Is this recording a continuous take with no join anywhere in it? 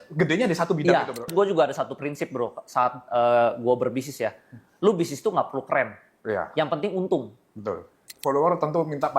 no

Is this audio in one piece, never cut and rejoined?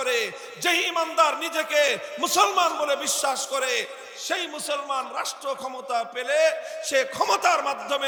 yes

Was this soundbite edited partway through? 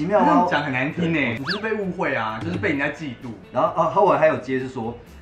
yes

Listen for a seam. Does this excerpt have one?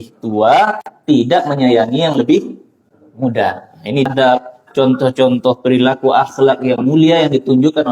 yes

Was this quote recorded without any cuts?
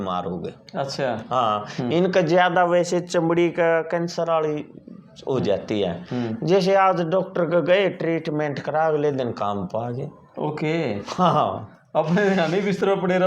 yes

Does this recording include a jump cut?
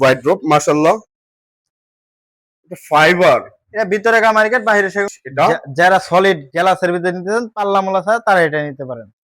yes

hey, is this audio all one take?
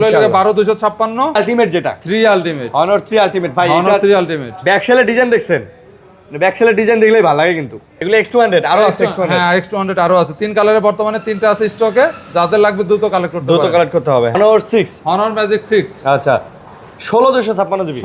no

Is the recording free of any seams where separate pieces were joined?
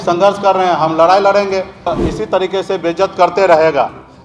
no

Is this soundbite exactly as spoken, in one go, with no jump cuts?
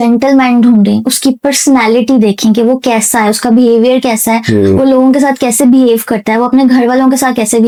yes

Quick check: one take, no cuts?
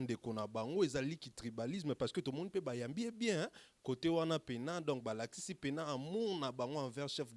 yes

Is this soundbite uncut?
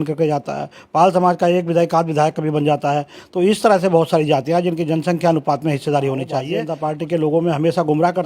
no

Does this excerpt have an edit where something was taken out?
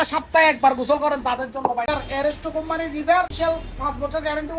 yes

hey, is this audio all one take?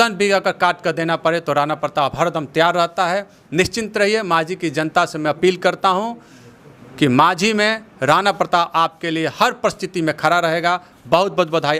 yes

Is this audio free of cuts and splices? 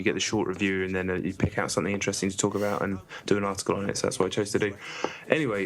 no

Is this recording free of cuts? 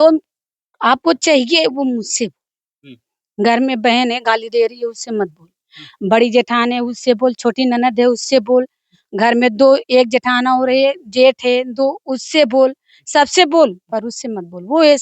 yes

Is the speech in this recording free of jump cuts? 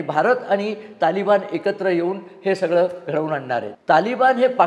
no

